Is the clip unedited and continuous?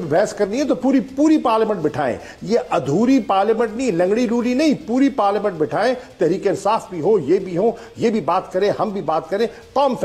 yes; 0 cuts

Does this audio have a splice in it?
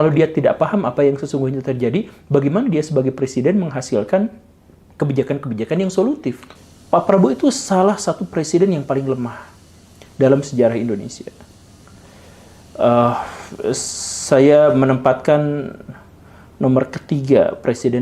yes; 1 cut; at 6.5 s

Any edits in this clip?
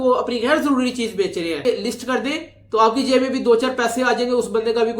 yes; 1 cut; at 1.6 s

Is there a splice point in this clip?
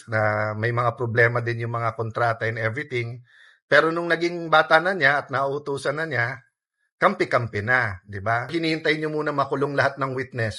yes; 1 cut; at 8.7 s

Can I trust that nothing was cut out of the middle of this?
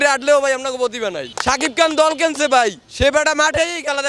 no; 1 cut; at 1.3 s

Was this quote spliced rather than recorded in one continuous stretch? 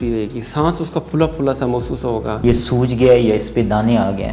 yes; 1 cut; at 2.4 s

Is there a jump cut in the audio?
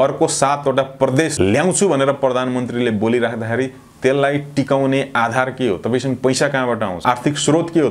yes; 2 cuts; at 1.3 s, 7.0 s

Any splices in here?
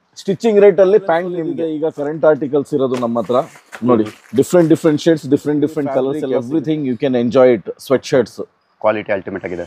yes; 2 cuts; at 1.5 s, 6.2 s

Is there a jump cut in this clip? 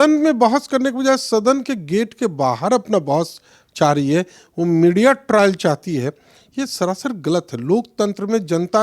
no; 0 cuts

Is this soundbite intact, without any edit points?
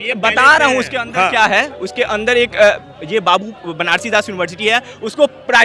yes; 0 cuts

